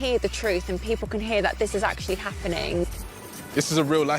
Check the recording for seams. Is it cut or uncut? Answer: cut